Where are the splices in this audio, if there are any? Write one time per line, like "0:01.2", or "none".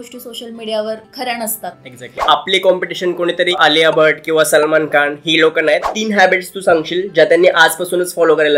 0:01.1
0:02.2
0:03.5
0:05.9